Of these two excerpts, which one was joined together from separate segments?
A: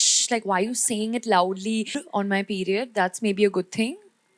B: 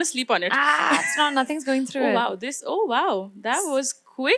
A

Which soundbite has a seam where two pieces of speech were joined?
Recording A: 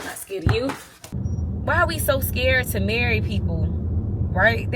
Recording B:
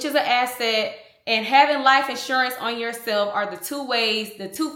A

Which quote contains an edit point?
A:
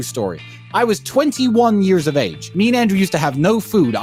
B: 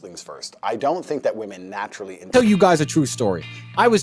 B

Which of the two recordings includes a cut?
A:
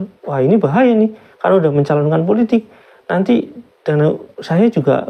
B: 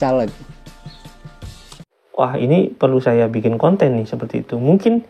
B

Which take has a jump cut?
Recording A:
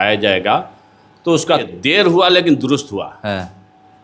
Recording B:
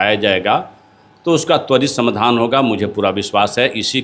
A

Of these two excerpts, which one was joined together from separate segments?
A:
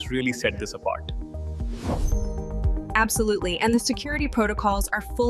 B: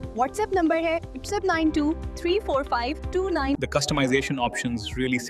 B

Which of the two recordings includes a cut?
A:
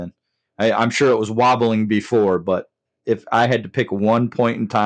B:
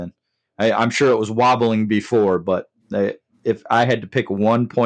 A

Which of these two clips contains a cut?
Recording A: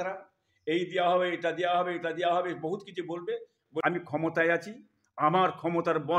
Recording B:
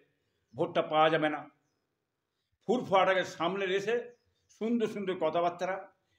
A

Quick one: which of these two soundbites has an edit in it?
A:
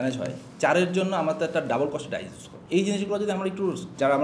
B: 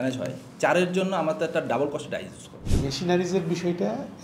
B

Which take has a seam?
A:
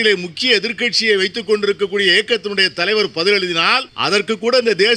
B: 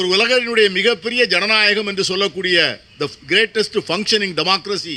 A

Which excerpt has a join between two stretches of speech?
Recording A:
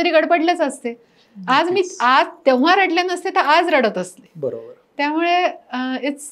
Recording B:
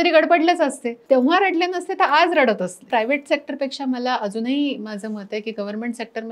B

